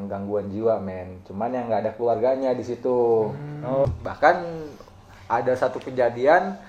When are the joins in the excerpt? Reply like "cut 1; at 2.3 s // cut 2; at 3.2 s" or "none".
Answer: cut 1; at 3.8 s